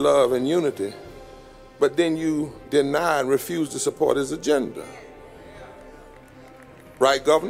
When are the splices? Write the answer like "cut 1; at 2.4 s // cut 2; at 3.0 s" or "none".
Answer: none